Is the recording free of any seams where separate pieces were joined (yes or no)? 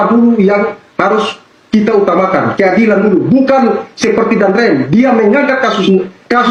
yes